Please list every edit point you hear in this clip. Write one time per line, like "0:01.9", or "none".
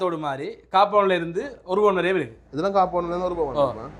none